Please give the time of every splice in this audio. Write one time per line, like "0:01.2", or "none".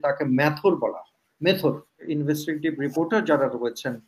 0:02.0